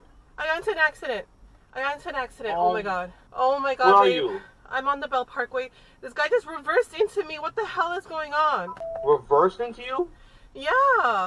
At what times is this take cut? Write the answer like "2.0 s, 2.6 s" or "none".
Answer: 3.2 s, 8.8 s